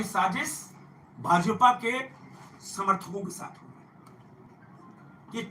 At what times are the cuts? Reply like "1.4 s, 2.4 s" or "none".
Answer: none